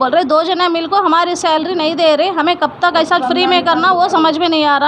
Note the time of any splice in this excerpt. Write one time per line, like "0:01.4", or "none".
none